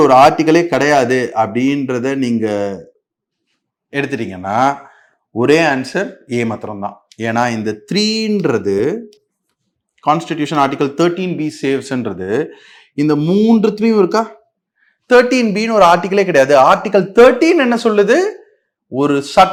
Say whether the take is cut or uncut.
uncut